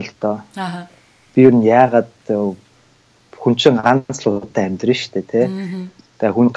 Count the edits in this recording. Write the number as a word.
zero